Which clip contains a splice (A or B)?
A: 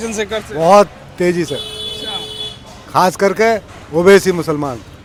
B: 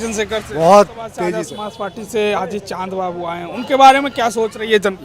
B